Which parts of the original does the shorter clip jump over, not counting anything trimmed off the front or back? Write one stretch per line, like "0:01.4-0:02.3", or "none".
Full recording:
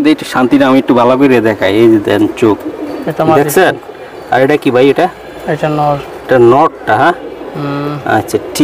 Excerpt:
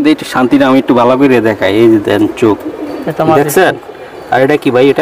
none

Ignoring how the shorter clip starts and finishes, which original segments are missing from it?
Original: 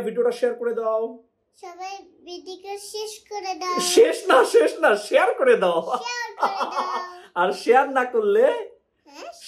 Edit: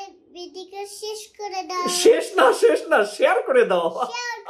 none

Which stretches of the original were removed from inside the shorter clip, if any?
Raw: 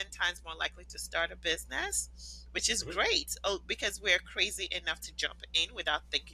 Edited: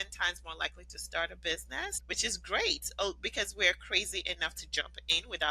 0:02.0-0:02.4

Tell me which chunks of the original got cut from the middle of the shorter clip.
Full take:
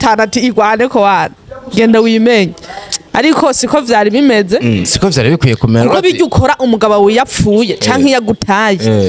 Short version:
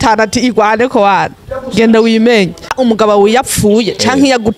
0:02.7-0:06.6

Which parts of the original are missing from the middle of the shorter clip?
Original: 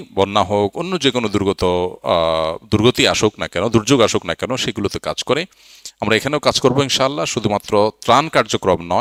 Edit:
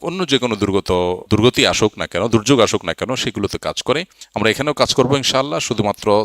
0:01.9-0:02.6
0:05.6-0:05.8

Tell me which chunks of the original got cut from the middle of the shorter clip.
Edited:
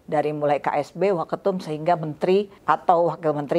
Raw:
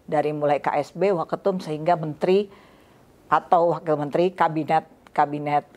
0:02.5-0:03.2

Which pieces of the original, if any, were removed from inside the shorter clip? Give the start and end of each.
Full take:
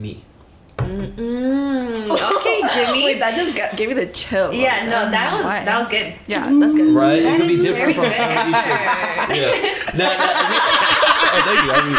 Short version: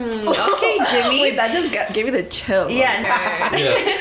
0:04.9-0:08.8

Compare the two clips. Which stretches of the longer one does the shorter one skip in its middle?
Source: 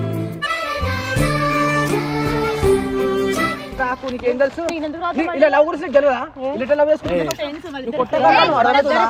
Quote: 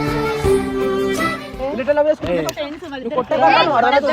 0:03.7-0:06.3

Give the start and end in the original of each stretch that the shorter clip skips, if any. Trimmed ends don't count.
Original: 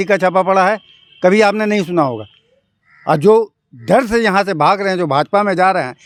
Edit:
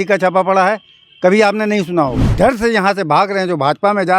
0:02.2-0:03.7

